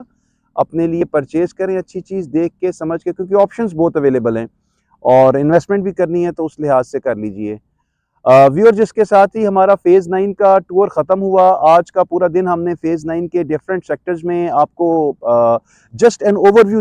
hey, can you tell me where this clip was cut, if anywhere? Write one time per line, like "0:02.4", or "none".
none